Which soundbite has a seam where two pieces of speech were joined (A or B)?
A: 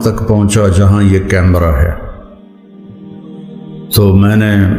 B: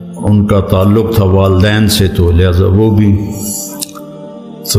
A